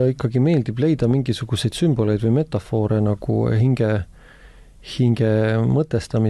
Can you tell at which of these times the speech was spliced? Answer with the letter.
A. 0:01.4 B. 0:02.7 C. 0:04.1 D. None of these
D